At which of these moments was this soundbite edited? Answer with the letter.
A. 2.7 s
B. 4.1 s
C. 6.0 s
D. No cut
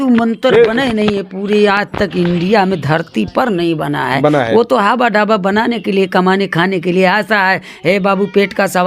D